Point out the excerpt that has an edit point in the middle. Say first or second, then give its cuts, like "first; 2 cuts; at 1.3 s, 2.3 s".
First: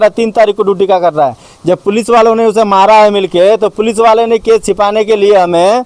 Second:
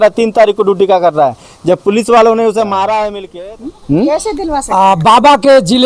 second; 1 cut; at 3.2 s